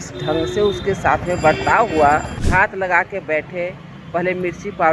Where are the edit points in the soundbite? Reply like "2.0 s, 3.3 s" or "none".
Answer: 2.4 s